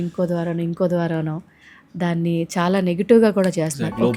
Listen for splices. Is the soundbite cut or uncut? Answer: uncut